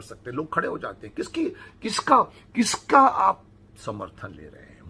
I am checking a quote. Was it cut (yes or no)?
no